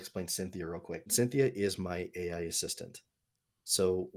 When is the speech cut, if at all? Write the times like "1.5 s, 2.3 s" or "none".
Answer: 1.1 s

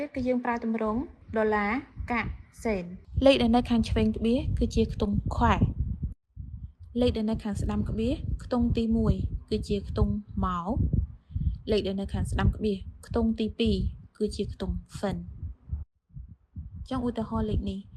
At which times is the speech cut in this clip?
3.0 s

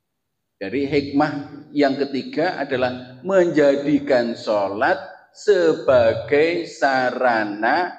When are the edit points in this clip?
none

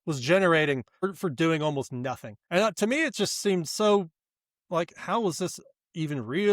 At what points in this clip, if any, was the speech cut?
1.0 s

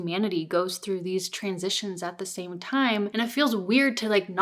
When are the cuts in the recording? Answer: 3.1 s

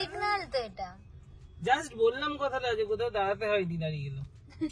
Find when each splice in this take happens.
none

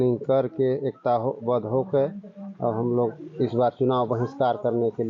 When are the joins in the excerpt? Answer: none

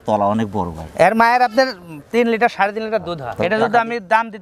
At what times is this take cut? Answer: 3.2 s

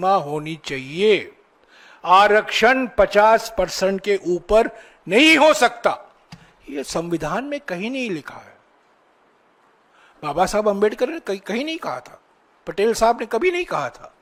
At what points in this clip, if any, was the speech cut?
none

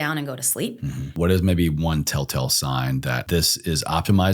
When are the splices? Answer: 1.1 s, 3.2 s

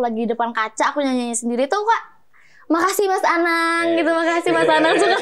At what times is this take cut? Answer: none

